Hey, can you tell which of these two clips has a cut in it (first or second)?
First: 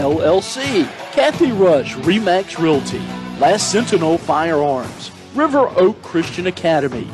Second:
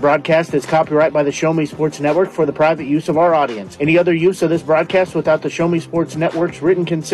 first